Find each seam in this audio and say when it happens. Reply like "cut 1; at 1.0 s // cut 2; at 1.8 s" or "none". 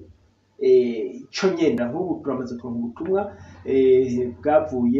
cut 1; at 1.8 s